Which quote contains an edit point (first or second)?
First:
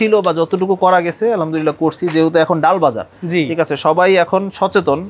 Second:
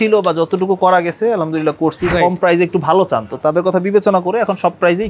second